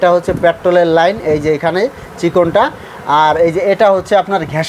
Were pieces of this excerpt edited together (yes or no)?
no